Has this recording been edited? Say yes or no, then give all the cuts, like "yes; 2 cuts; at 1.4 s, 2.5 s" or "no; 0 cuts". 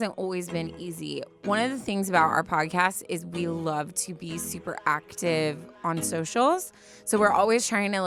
no; 0 cuts